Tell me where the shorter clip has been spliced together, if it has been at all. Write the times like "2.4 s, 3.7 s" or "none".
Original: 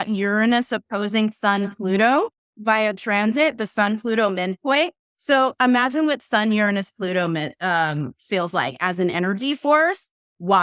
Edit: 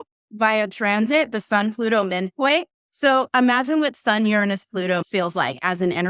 5.0 s